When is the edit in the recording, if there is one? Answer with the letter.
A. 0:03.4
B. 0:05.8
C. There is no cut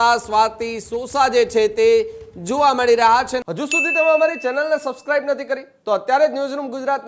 A